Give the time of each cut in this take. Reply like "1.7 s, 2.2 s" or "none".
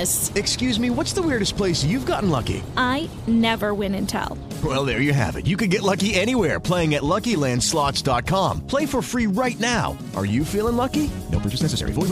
none